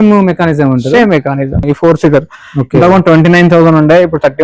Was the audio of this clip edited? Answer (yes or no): yes